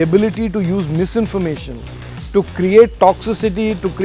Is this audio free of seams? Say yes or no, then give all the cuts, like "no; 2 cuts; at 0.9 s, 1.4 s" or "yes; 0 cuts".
yes; 0 cuts